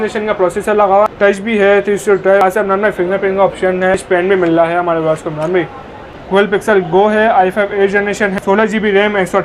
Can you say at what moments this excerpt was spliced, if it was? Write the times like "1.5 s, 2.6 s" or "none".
1.1 s, 2.4 s, 4.0 s, 6.0 s, 8.3 s